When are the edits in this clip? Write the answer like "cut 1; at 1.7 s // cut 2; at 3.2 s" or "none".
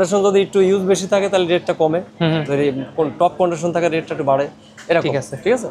none